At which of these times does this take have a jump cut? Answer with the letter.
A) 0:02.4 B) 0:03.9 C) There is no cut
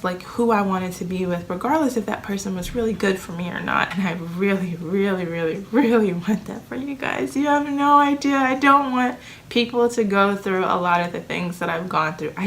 B